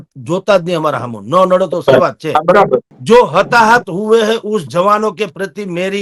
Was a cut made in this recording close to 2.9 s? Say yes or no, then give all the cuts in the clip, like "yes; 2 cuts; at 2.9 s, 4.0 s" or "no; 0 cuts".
yes; 1 cut; at 2.9 s